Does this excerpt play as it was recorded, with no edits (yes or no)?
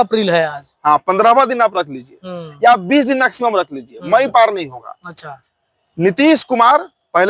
yes